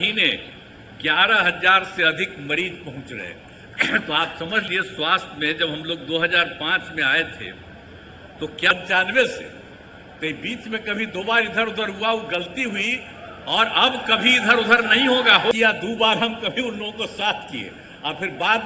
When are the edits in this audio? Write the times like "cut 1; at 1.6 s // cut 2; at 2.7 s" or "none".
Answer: cut 1; at 4.7 s // cut 2; at 8.7 s // cut 3; at 15.5 s